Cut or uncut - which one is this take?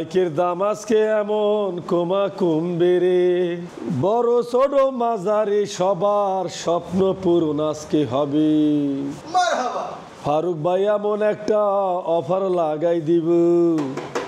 uncut